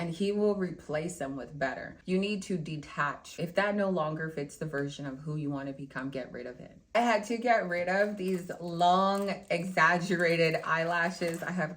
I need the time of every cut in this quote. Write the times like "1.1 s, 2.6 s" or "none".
1.9 s, 3.2 s, 6.9 s